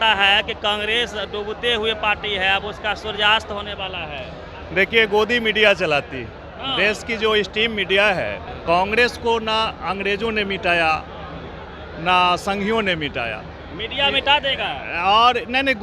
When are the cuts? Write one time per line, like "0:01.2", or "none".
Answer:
0:08.5

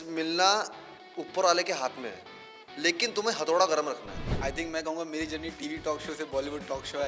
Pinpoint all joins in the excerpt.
0:04.3

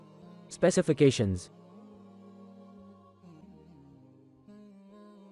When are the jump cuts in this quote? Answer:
none

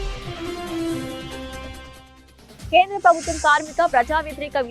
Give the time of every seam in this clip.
0:01.1
0:01.9

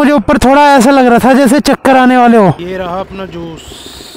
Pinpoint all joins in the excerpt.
0:02.6

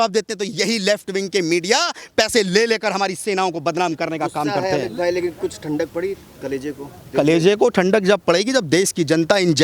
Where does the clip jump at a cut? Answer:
none

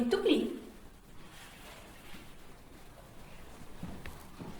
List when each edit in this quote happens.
0:03.0

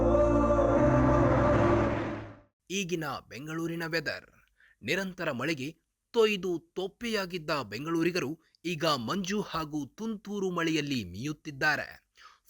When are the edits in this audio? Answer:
0:01.2

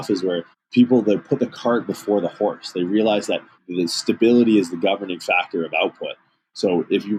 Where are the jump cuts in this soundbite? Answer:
none

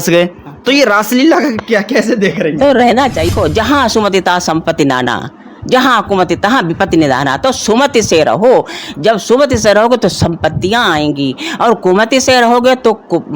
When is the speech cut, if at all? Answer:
0:03.3

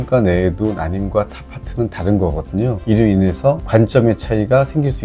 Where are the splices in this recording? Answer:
none

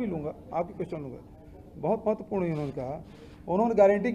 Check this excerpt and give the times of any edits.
none

